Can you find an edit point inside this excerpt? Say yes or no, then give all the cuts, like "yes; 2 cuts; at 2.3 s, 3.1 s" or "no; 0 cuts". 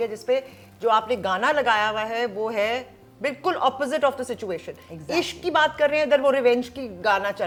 no; 0 cuts